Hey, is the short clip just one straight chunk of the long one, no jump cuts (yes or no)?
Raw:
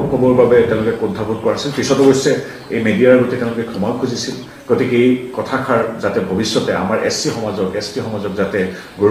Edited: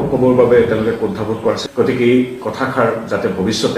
no